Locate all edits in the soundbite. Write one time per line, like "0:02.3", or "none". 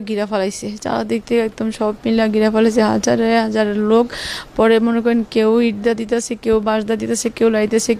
none